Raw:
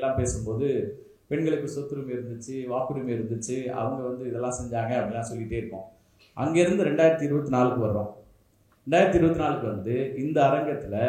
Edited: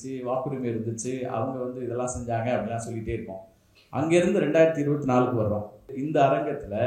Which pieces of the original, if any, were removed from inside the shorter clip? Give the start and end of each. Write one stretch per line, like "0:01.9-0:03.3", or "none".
0:08.4-0:10.2